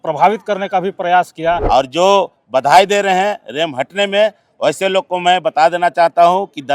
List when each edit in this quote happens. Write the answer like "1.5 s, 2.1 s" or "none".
1.6 s